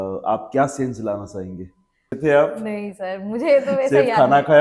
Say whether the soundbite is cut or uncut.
cut